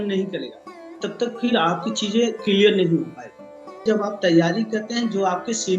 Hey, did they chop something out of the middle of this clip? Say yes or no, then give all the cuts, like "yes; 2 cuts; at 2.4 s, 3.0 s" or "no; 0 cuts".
yes; 1 cut; at 3.8 s